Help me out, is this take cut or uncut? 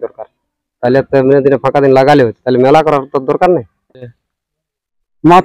cut